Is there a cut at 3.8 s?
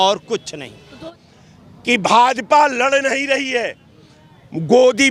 no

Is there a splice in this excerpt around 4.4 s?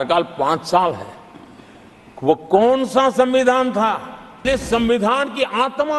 yes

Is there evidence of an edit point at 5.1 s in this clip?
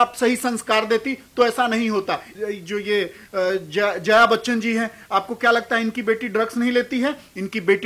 no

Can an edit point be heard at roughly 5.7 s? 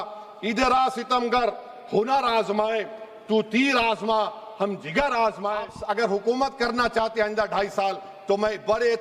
yes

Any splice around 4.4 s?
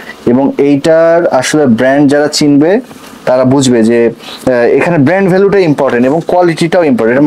no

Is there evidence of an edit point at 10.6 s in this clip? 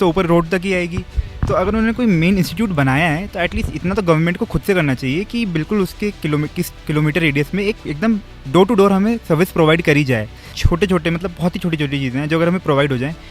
yes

